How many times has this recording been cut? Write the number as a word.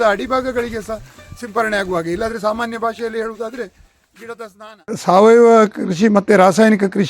one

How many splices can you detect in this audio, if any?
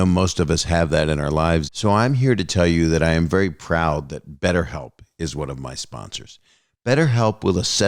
one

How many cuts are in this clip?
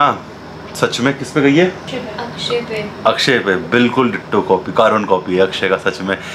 zero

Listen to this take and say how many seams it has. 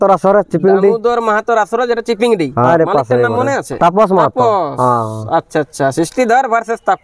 two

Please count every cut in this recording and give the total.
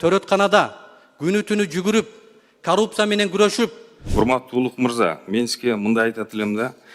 one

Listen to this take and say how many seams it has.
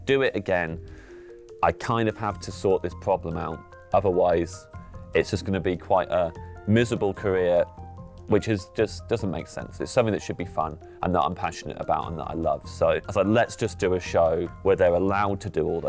two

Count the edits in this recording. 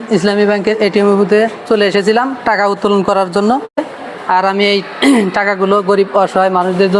one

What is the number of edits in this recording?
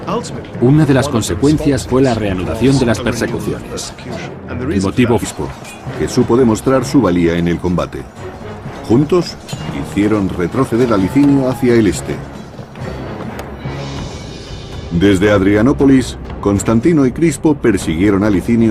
zero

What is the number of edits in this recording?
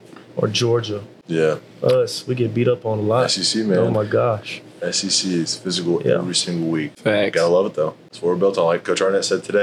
three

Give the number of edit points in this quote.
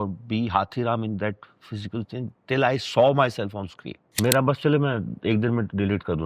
one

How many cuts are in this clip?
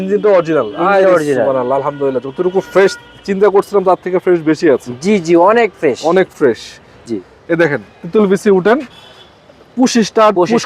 one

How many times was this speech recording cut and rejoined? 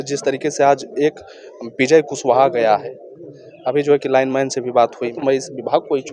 one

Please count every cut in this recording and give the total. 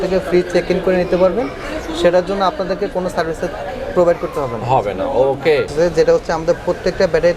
one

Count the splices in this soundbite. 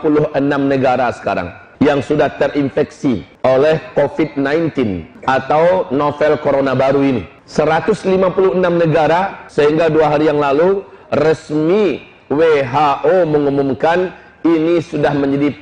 five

